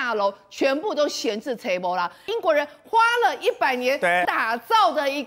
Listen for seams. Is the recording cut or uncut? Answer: cut